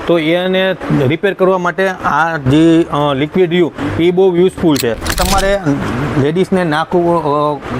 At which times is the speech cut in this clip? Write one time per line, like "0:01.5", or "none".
0:05.2